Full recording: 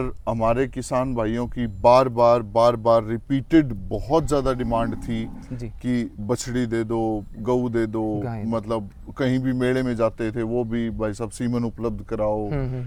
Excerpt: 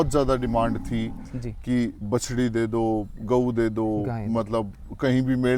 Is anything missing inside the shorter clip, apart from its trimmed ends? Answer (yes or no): no